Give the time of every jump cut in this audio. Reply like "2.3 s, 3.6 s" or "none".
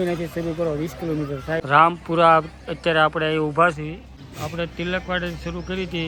none